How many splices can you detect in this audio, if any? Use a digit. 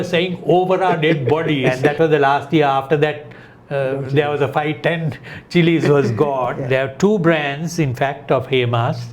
2